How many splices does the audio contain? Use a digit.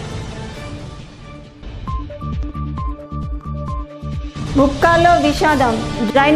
1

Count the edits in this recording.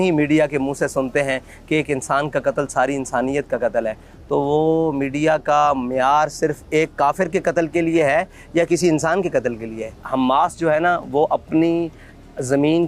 1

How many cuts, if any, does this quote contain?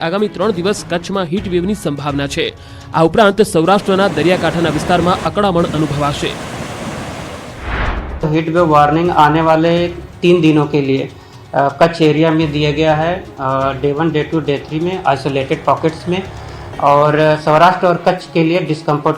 1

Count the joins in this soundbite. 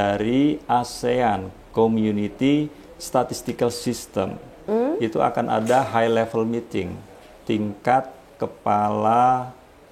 1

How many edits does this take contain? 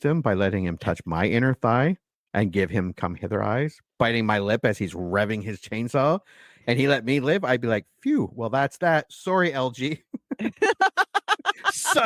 0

